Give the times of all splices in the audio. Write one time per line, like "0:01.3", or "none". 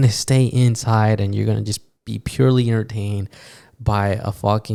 none